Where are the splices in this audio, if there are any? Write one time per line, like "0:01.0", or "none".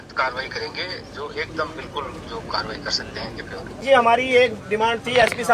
0:03.7